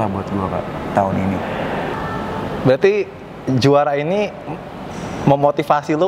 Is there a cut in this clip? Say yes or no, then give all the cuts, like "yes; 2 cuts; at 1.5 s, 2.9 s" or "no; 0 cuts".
yes; 1 cut; at 1.9 s